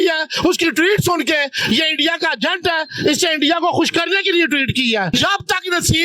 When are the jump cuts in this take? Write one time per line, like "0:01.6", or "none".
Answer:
0:05.1